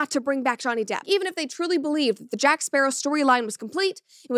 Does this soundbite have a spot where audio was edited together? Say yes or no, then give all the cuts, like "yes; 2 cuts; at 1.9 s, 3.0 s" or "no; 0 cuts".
yes; 1 cut; at 1.0 s